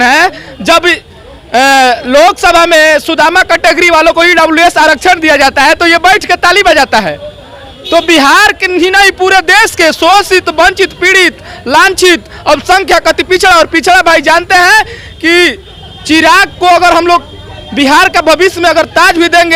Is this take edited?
no; 0 cuts

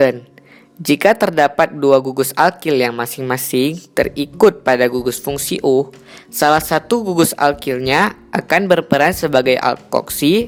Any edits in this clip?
no; 0 cuts

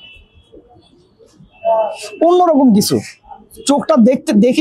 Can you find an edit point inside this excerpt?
no; 0 cuts

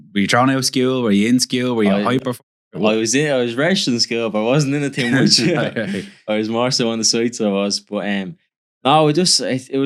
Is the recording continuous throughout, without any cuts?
yes; 0 cuts

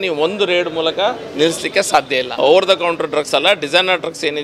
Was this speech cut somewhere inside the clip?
yes; 1 cut; at 2.3 s

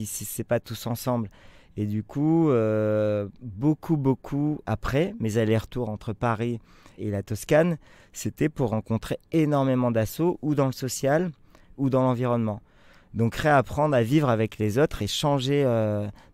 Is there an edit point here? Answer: no; 0 cuts

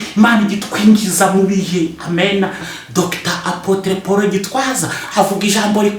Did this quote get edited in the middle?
yes; 1 cut; at 2.8 s

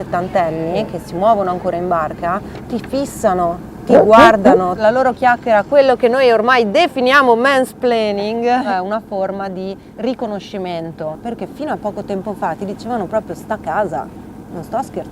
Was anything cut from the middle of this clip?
yes; 3 cuts; at 4.8 s, 8.7 s, 11.2 s

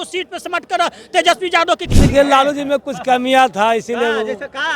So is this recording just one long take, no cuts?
no; 1 cut; at 1.9 s

